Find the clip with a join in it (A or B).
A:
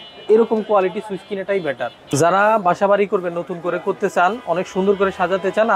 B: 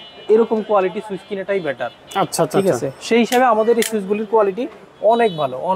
A